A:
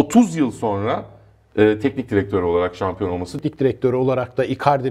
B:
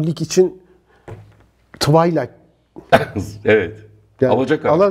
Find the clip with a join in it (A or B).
A